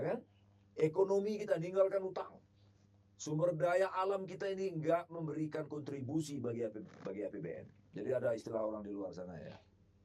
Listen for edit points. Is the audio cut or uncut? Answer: cut